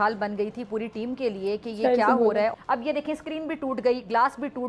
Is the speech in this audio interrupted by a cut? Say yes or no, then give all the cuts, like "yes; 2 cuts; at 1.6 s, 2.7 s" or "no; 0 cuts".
yes; 1 cut; at 2.5 s